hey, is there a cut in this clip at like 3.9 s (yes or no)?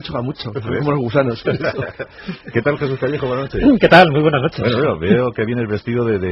yes